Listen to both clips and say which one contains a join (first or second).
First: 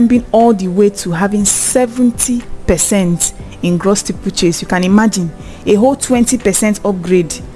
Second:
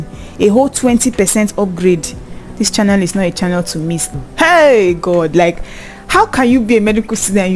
second